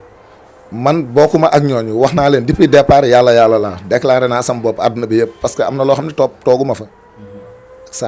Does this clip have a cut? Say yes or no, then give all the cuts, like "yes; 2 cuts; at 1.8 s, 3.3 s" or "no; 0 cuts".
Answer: no; 0 cuts